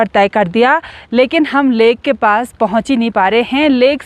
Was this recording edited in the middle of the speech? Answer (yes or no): no